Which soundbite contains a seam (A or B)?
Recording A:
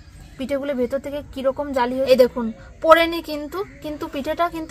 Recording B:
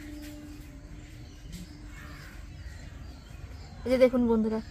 A